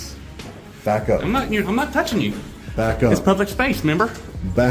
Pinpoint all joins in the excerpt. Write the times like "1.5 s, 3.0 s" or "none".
none